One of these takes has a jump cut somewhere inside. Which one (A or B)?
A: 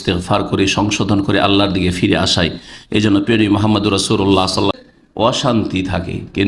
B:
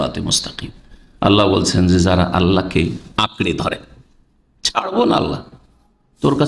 A